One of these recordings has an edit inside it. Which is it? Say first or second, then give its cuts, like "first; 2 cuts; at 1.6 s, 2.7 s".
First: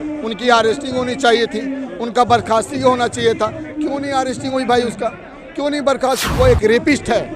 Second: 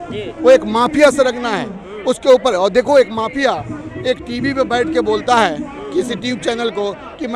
first; 1 cut; at 6.3 s